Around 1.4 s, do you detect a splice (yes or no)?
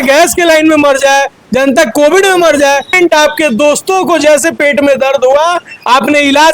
no